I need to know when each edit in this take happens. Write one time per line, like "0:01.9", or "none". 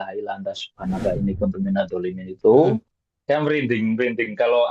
0:02.9